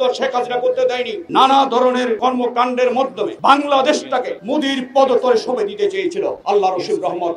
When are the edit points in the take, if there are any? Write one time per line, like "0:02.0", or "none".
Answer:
0:01.2
0:02.2
0:03.3
0:04.4
0:06.4